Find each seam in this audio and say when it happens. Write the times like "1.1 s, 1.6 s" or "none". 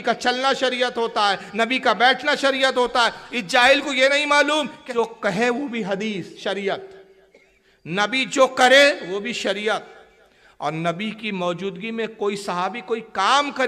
4.8 s

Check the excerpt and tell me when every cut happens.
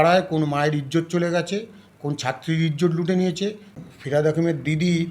3.9 s

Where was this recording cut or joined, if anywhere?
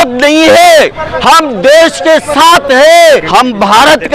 3.2 s

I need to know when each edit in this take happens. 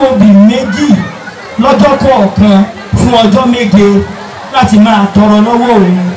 none

